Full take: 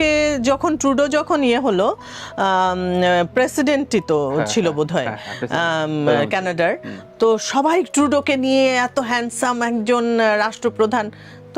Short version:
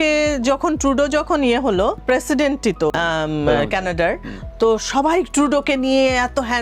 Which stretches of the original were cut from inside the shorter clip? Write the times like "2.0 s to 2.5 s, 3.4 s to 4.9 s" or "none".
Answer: 2.0 s to 3.3 s, 4.2 s to 5.5 s

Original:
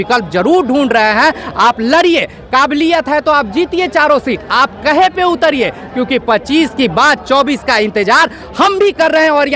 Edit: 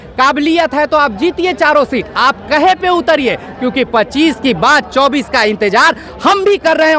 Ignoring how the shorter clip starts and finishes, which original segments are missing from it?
none

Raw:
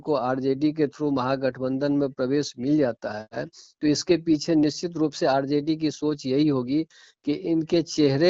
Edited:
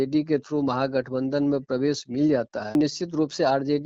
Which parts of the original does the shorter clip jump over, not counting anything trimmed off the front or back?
3.2 s to 4.6 s

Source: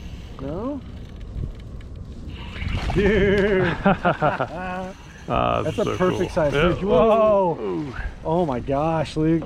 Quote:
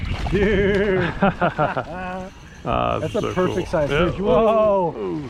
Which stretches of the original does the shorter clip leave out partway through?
none

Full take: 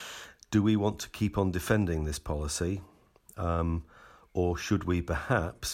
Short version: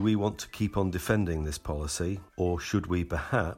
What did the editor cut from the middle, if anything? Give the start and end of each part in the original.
2.9 s to 4.2 s

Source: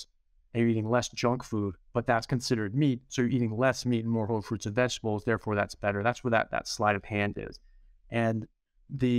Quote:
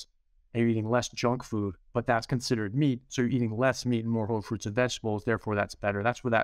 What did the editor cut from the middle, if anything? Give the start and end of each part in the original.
none

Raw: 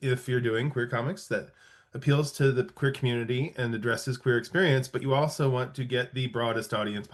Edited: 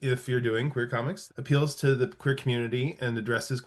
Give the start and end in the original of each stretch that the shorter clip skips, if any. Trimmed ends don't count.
1.2 s to 1.7 s

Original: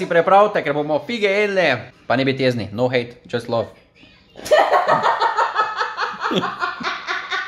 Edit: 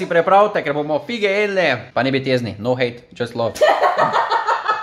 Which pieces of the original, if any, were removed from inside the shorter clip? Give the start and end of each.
1.8 s to 2.0 s, 3.7 s to 4.4 s

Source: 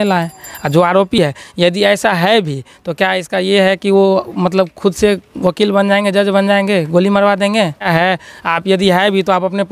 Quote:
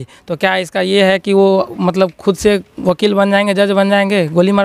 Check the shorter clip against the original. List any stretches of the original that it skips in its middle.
none

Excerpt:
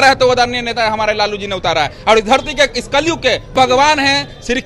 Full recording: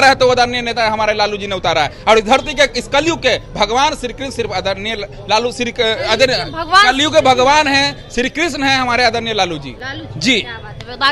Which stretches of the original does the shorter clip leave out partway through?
3.5 s to 7.2 s

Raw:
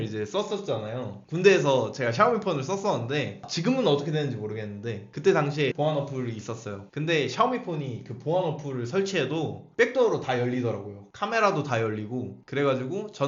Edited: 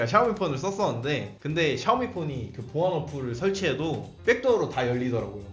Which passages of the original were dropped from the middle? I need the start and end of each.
3.4 s to 6.9 s

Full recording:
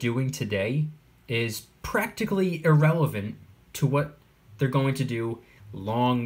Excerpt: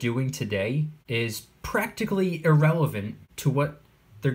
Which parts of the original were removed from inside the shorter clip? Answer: 1.0 s to 1.2 s, 3.4 s to 3.6 s

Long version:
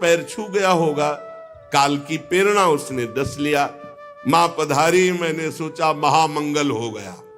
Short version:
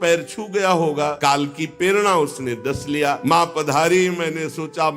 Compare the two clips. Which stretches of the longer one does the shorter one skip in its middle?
1.2 s to 1.7 s, 3.7 s to 4.2 s

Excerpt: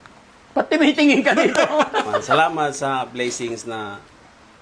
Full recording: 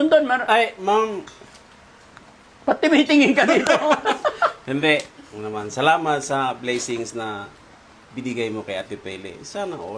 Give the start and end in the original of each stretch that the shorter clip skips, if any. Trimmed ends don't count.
4.4 s to 5.8 s

